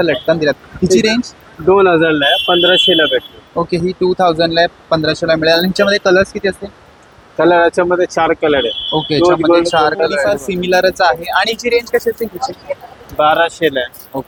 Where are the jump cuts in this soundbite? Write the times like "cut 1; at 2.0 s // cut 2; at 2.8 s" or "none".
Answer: none

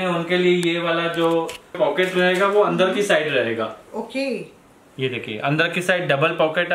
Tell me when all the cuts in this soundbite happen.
cut 1; at 1.8 s

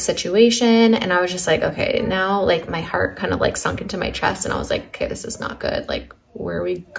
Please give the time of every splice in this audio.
none

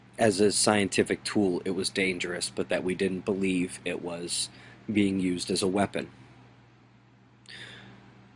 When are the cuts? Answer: cut 1; at 2.7 s

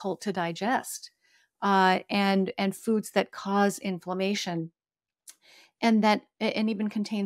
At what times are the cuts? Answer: none

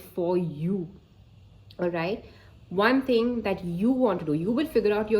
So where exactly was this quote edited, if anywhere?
none

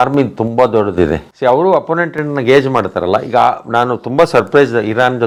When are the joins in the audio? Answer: none

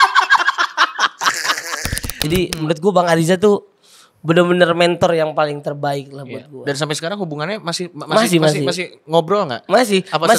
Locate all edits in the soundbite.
cut 1; at 2.1 s

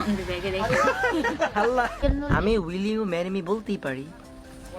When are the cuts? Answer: cut 1; at 2.0 s

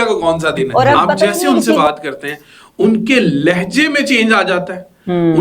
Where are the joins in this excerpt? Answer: cut 1; at 1.4 s

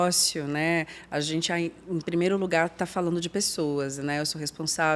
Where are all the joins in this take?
none

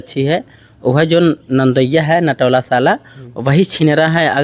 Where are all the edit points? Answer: none

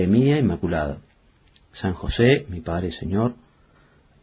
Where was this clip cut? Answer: cut 1; at 2.7 s

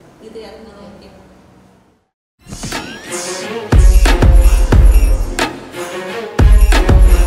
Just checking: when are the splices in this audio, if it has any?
cut 1; at 2.2 s

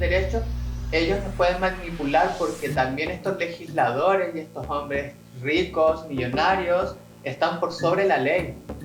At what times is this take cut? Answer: none

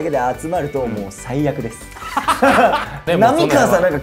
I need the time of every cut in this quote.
cut 1; at 3.0 s

